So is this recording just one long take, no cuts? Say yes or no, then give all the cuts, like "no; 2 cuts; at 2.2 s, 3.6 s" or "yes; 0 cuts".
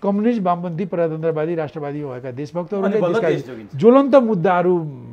yes; 0 cuts